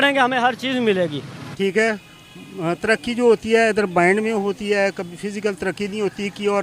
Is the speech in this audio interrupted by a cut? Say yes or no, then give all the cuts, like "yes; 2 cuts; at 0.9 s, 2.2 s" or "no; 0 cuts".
yes; 1 cut; at 1.7 s